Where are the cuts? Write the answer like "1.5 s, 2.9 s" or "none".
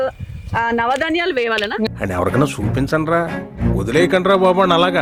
1.9 s